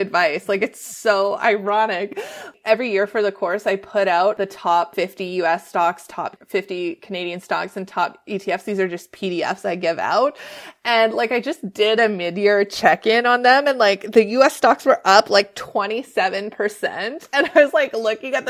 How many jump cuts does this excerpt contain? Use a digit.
3